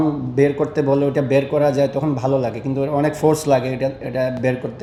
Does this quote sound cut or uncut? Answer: uncut